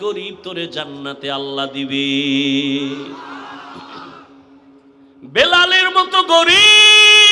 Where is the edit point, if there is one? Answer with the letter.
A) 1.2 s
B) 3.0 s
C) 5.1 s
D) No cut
C